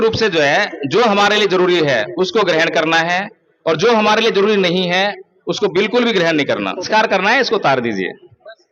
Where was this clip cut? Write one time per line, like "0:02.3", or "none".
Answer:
0:06.8

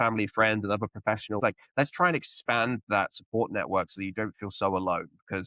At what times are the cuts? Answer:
0:01.4

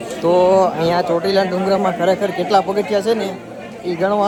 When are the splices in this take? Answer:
none

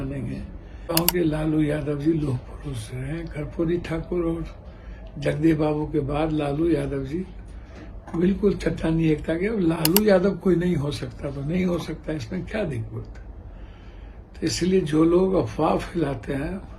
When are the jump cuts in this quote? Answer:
0:00.9

